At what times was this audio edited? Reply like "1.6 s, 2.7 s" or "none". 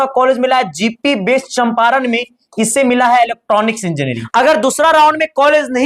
4.2 s